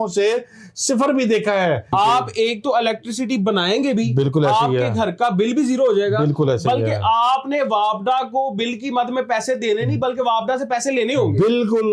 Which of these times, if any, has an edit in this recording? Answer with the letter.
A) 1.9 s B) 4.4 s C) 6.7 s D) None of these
A